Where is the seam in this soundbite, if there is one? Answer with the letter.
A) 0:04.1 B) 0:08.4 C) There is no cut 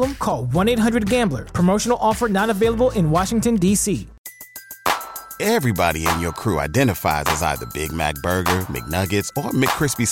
A